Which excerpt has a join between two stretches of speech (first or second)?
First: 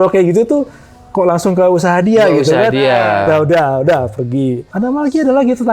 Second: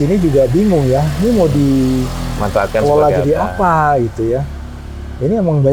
first